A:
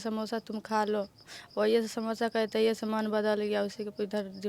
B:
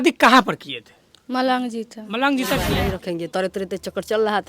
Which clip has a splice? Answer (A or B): B